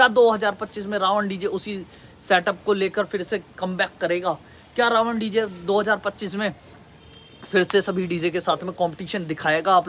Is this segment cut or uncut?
uncut